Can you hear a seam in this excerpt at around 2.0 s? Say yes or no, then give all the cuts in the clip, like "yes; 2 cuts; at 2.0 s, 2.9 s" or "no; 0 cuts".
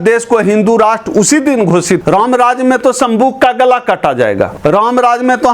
yes; 2 cuts; at 2.0 s, 4.5 s